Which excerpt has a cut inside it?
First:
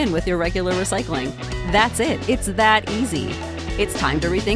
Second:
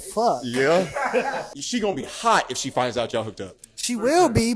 second; 1 cut; at 1.5 s

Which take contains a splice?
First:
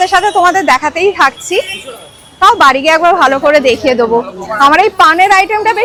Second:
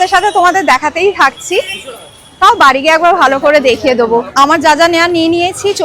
second; 1 cut; at 4.3 s

